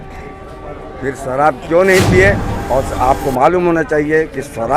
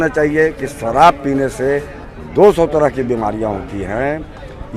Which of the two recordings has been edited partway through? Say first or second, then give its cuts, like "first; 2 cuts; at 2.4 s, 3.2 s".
first; 1 cut; at 2.5 s